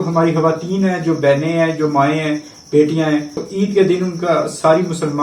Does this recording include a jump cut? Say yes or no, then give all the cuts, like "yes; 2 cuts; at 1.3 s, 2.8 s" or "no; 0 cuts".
yes; 1 cut; at 3.4 s